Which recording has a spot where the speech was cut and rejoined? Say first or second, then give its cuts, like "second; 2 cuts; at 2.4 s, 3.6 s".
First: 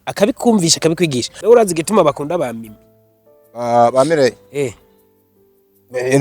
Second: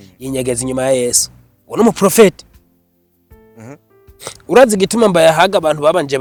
first; 1 cut; at 1.3 s